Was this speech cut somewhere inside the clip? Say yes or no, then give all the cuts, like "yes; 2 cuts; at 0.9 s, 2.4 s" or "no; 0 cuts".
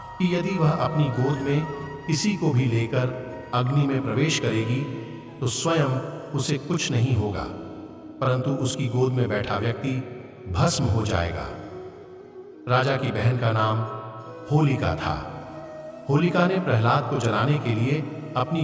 no; 0 cuts